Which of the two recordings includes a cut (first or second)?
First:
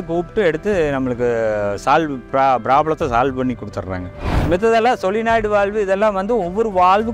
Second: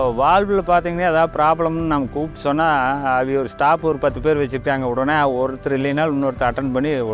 first